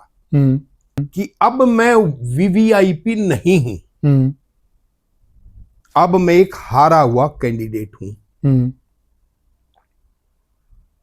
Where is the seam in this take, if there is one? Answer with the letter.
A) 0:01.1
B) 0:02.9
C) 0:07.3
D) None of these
A